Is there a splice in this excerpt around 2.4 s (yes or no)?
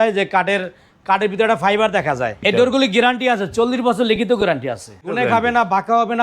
yes